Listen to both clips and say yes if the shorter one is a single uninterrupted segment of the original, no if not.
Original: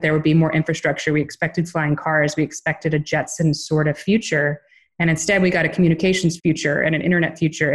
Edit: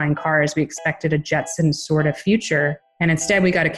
no